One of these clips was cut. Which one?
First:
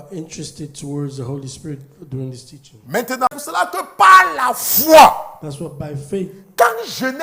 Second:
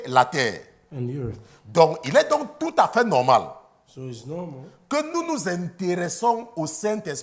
first; 1 cut; at 3.3 s

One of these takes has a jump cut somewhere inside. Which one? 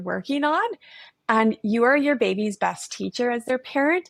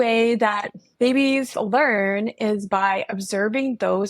second; 1 cut; at 1.5 s

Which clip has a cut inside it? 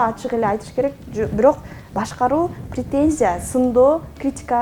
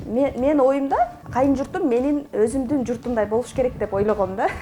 second; 1 cut; at 1.2 s

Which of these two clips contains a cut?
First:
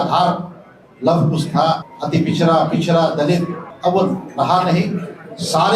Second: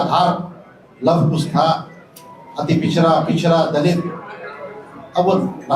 first; 2 cuts; at 1.9 s, 3.6 s

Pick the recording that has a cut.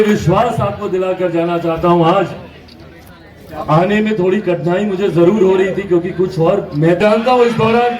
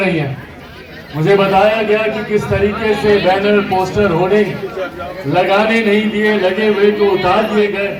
first; 1 cut; at 7.0 s

